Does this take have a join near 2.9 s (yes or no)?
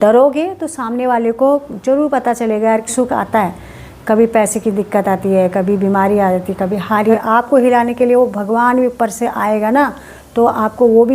yes